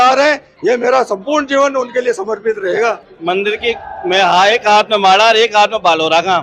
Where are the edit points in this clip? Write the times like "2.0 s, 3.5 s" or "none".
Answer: 3.0 s